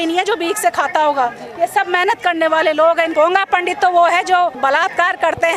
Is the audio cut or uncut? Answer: cut